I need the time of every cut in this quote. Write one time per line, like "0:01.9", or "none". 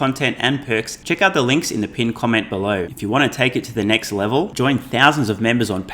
0:00.9
0:02.9